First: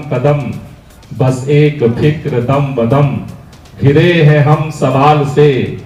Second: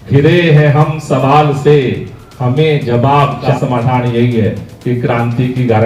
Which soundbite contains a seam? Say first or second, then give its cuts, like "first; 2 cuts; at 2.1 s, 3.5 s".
second; 1 cut; at 3.4 s